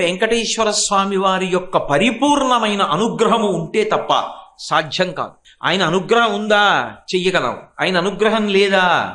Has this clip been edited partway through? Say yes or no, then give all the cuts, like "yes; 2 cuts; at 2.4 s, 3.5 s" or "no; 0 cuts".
yes; 1 cut; at 5.4 s